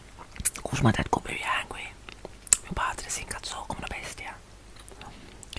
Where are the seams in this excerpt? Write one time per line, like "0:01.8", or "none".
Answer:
none